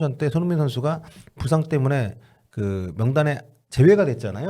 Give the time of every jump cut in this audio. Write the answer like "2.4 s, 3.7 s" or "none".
none